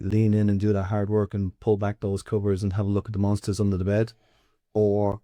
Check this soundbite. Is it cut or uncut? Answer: uncut